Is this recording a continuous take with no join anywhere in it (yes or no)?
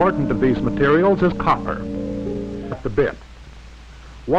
yes